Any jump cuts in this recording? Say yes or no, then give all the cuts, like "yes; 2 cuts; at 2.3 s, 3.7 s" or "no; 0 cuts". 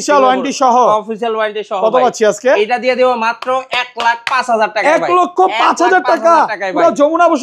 no; 0 cuts